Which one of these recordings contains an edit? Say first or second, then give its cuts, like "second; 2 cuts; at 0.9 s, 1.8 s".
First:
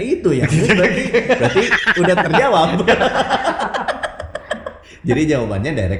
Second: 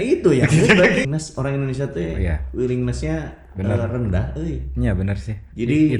second; 1 cut; at 1.1 s